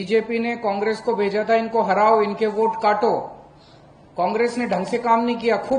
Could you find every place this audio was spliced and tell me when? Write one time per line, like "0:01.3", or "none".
none

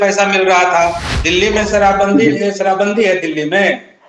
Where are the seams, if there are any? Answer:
0:01.0

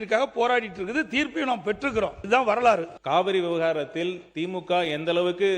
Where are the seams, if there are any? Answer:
0:02.2
0:02.9

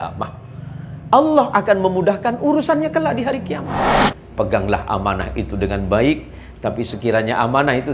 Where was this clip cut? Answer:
0:04.2

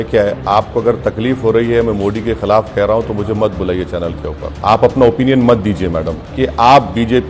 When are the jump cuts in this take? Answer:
0:04.6
0:06.2

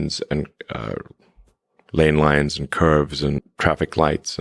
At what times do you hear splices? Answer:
0:03.5

